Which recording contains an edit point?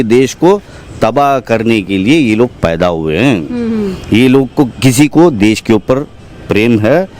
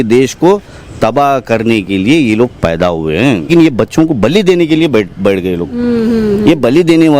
second; 1 cut; at 3.5 s

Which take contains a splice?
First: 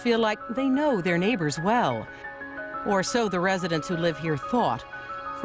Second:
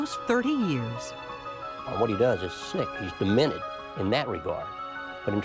first; 1 cut; at 3.8 s

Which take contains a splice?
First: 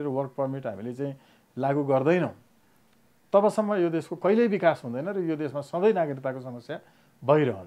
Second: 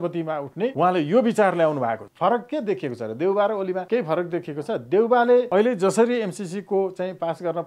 second; 4 cuts; at 0.7 s, 2.1 s, 3.8 s, 5.5 s

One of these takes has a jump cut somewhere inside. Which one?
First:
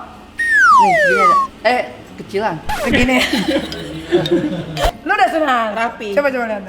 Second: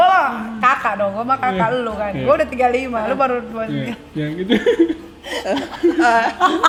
first; 1 cut; at 4.9 s

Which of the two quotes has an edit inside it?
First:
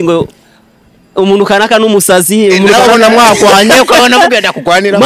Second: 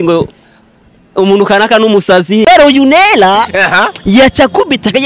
second; 1 cut; at 2.4 s

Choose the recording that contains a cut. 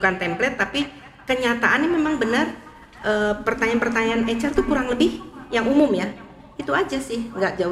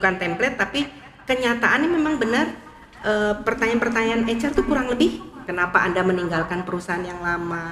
second; 1 cut; at 5.3 s

